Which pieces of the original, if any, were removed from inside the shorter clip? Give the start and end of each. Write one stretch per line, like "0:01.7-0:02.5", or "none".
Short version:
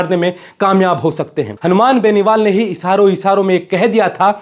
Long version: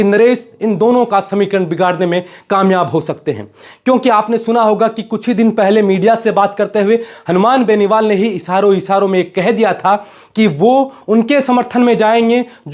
0:03.4-0:07.1

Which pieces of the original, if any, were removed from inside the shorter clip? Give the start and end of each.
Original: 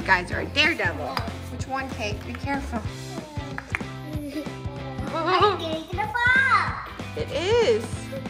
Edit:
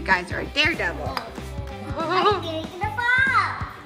0:01.5-0:04.7

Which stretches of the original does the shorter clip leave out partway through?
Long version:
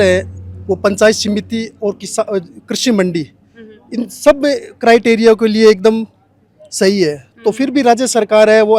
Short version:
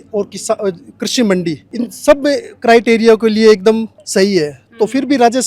0:03.3-0:03.8
0:06.2-0:06.6

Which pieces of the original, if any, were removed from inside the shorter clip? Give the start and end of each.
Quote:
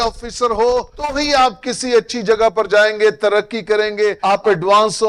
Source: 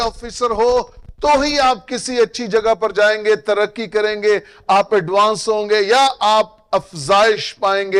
0:01.2-0:01.4
0:04.4-0:04.6

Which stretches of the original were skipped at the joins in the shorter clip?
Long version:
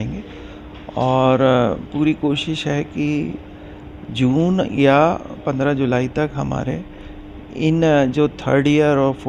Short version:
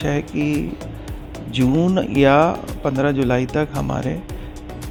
none

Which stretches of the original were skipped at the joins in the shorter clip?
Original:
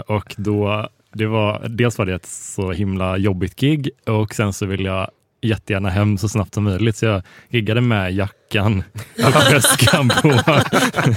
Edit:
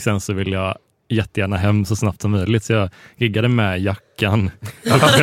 none

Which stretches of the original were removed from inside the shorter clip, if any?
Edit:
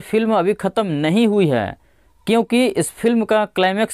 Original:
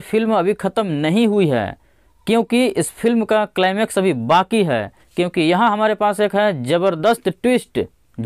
none

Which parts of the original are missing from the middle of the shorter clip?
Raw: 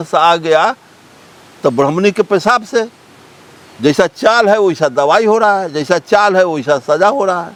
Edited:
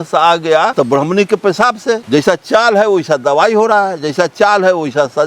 0:00.7-0:01.6
0:02.9-0:03.7

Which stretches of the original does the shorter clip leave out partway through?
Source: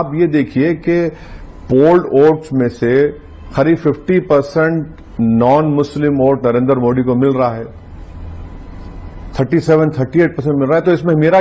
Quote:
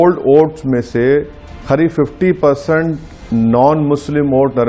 none

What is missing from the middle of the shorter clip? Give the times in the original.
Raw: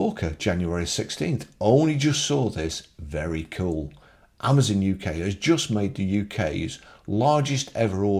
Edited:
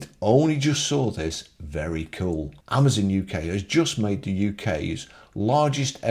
0:04.0-0:04.3

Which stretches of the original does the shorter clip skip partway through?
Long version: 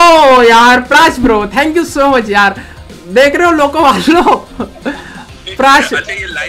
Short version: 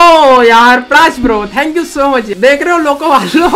0:02.3-0:03.0

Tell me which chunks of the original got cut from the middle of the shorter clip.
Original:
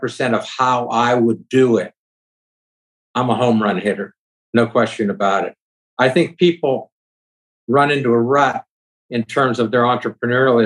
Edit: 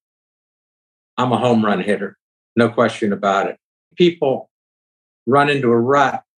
0:05.9-0:06.3

